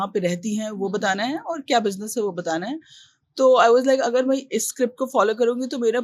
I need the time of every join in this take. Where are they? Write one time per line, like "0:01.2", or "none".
none